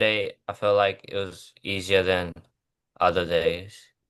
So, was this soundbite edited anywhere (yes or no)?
no